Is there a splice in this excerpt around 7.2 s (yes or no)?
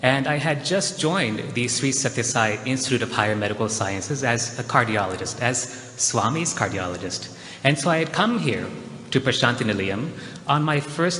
no